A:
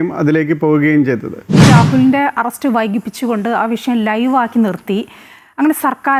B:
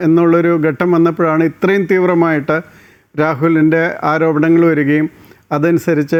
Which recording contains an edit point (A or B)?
A